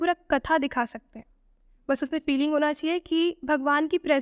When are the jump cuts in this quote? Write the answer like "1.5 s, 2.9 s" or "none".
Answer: none